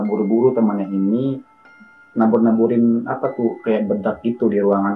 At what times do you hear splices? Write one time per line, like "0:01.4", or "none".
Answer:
none